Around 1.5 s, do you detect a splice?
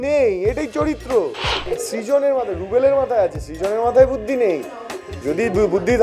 yes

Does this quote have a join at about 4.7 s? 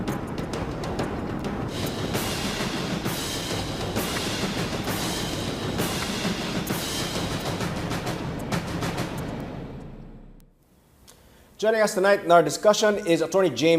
no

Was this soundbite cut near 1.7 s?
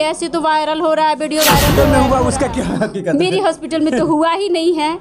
yes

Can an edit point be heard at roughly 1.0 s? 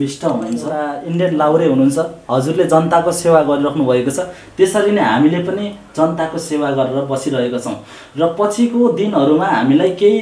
yes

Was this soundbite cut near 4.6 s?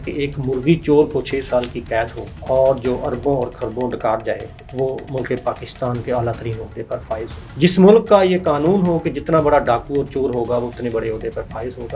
yes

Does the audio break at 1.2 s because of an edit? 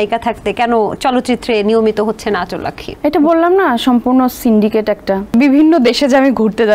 no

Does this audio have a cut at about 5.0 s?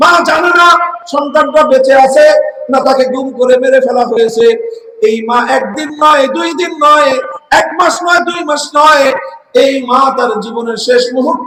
no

